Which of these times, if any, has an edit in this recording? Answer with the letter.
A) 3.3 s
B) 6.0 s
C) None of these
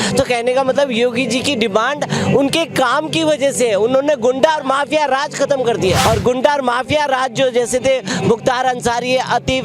B